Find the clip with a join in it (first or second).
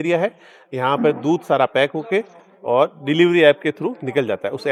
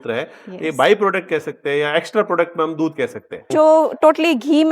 second